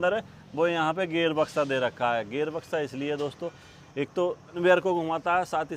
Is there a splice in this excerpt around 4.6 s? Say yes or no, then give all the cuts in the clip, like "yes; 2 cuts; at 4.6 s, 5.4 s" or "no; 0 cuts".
yes; 1 cut; at 4.6 s